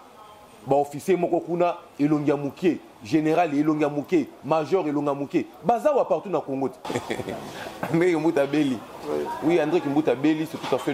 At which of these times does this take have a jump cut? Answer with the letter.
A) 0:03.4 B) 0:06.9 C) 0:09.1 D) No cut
B